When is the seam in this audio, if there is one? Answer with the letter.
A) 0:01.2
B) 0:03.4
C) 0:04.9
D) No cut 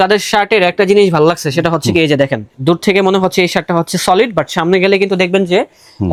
D